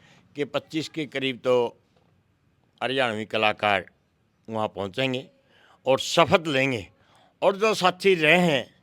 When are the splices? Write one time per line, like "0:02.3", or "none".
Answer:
none

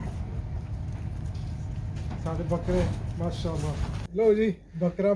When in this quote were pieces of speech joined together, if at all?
0:04.0

